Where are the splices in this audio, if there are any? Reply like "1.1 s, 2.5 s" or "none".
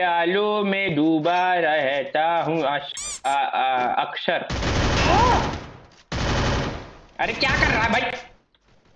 none